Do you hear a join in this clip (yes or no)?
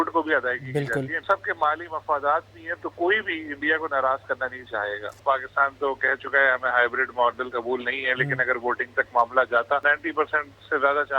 yes